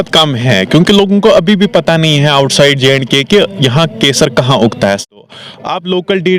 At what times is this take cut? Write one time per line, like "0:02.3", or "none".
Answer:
0:05.0